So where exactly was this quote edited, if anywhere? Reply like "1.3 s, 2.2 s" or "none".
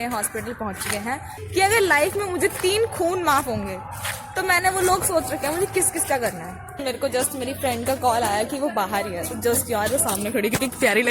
1.4 s, 6.8 s